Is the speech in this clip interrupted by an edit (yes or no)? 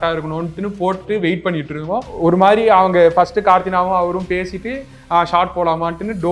yes